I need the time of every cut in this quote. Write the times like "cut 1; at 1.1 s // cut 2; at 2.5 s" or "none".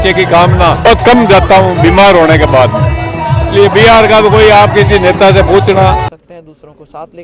cut 1; at 0.8 s // cut 2; at 6.1 s